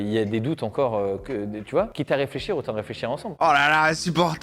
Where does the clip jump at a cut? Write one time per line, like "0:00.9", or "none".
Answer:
0:03.4